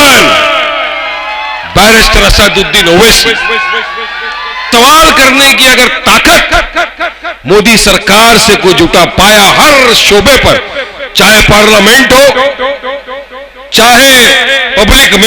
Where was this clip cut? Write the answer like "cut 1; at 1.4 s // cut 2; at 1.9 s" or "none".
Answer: cut 1; at 4.7 s